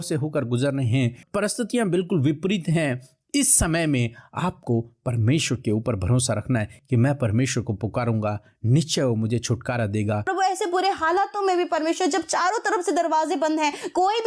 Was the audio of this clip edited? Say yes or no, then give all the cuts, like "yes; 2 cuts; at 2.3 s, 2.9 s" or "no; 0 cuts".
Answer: yes; 3 cuts; at 1.2 s, 6.8 s, 10.3 s